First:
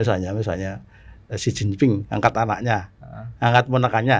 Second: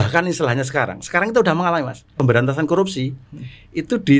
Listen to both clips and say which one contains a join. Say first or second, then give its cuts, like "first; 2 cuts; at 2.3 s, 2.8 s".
second; 1 cut; at 2.1 s